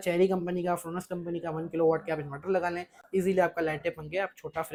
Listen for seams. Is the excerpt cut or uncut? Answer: uncut